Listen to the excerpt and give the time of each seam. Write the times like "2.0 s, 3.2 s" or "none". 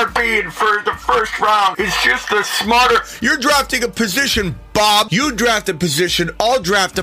1.7 s, 5.1 s